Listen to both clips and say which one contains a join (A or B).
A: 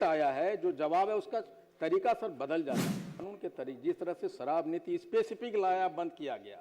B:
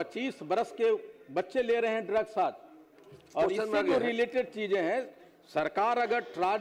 A